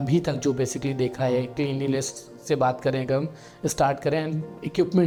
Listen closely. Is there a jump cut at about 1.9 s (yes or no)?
no